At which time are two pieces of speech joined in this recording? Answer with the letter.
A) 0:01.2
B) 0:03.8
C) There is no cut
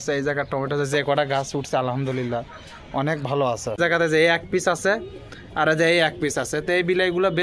B